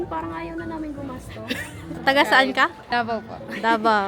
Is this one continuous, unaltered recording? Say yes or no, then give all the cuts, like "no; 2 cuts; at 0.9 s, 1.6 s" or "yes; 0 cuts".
no; 2 cuts; at 2.0 s, 2.8 s